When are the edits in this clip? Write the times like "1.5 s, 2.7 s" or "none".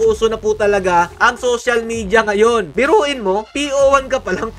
2.7 s